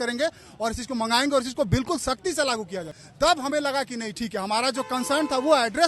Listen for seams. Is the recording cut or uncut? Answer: cut